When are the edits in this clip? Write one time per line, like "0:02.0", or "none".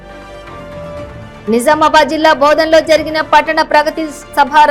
0:00.9